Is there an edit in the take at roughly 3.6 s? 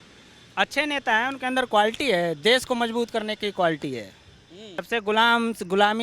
no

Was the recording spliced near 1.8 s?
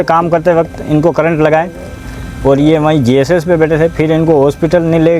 no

